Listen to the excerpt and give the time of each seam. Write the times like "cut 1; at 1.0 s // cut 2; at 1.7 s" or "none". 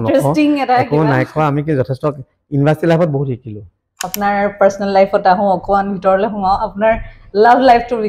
cut 1; at 4.1 s